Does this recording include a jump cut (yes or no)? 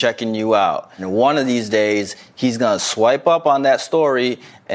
yes